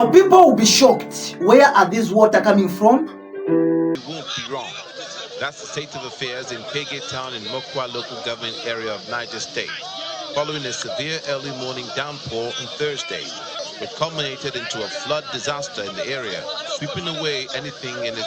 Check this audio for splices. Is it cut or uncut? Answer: cut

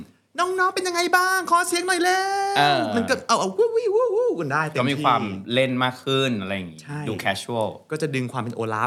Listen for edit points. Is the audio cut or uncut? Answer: uncut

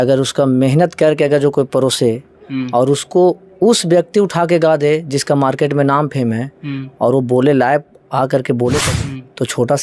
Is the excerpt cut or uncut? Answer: cut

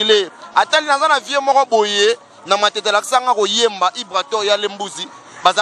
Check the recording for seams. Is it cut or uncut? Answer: uncut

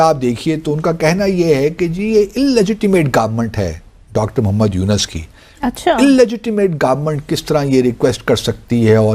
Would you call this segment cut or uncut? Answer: uncut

